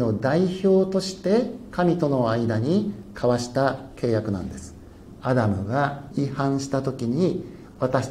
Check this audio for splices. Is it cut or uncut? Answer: cut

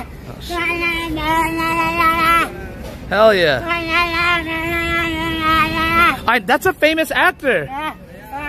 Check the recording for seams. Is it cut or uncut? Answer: uncut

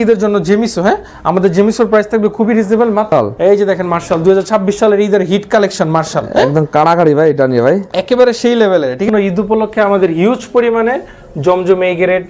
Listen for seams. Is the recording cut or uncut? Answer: cut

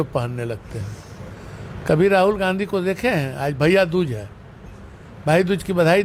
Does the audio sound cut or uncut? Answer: uncut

